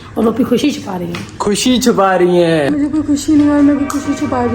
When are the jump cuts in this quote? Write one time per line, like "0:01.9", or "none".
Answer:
0:02.7

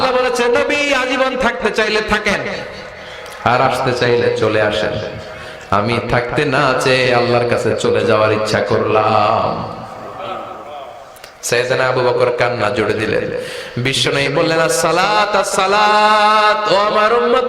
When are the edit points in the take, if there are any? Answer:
none

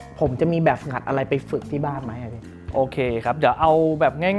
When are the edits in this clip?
none

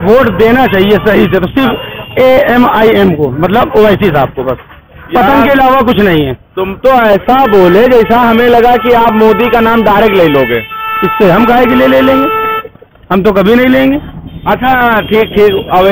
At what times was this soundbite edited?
none

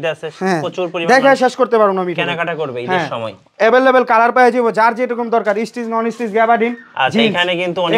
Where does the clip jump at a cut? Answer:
none

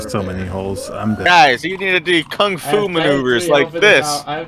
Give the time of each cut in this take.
0:01.3

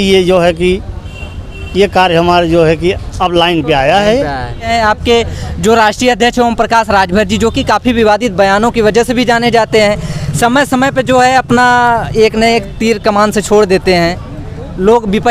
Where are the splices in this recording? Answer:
0:04.7

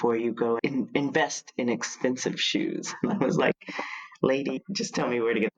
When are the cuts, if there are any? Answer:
0:04.6

